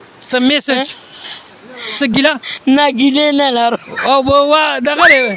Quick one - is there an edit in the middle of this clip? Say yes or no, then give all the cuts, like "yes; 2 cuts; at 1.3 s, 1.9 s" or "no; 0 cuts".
yes; 1 cut; at 2.2 s